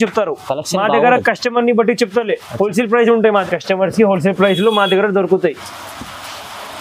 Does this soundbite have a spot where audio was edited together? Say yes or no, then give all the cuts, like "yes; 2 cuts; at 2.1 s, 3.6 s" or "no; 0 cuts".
yes; 1 cut; at 3.4 s